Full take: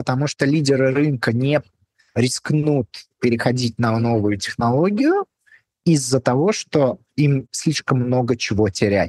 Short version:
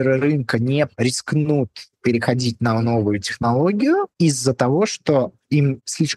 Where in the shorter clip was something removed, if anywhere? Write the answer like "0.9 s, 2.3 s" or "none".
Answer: 0.9 s, 4.1 s